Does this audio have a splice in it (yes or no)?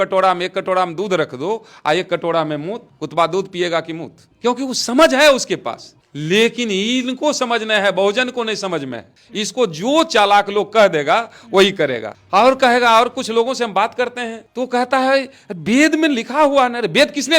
no